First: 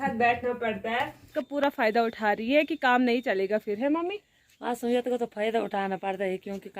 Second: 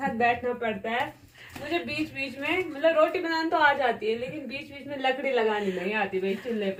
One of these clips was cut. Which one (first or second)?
first